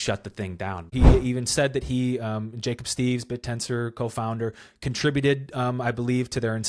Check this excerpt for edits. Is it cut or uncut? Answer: cut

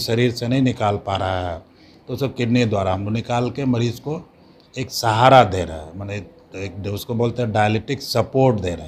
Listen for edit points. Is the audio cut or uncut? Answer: uncut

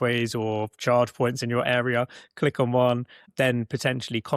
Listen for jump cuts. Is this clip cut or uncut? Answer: cut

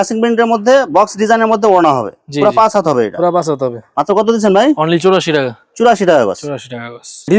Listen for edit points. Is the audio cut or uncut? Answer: uncut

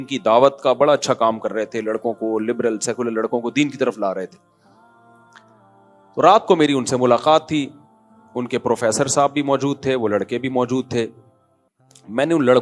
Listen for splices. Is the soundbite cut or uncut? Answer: cut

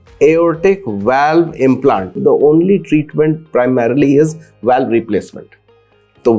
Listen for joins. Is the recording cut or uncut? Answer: cut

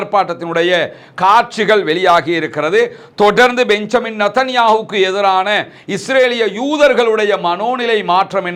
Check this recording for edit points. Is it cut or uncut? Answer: uncut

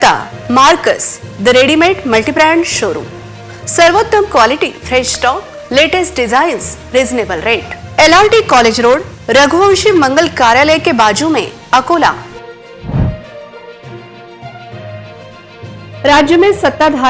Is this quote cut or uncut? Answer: uncut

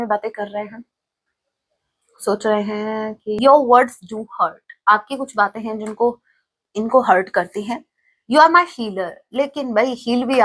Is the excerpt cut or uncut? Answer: cut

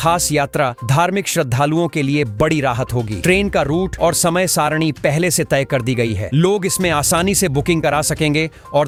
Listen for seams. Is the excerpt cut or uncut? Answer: uncut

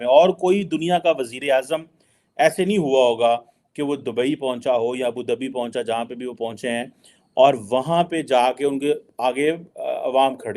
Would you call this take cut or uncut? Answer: uncut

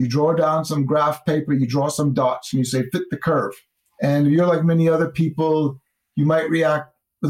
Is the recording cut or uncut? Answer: uncut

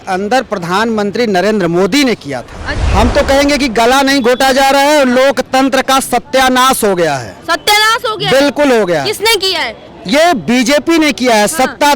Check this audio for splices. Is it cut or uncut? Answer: cut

